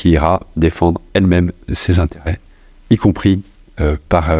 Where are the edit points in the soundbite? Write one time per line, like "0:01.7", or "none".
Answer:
0:02.4